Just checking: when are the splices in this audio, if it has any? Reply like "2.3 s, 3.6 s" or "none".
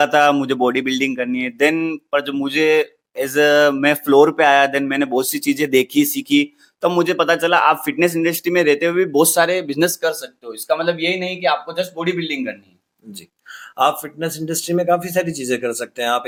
none